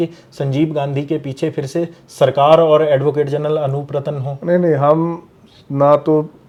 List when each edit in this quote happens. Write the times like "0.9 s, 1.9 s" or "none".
none

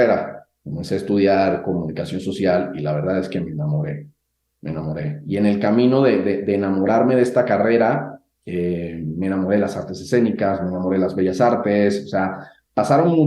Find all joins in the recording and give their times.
none

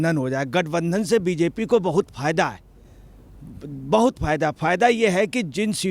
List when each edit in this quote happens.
none

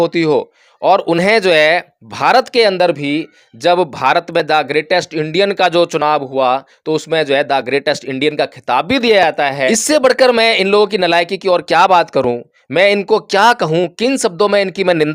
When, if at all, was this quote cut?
9.7 s

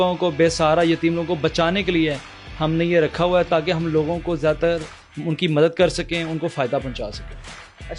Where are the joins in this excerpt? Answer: none

